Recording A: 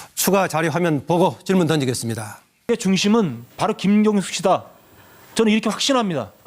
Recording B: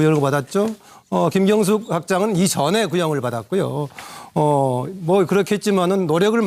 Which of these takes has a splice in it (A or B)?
A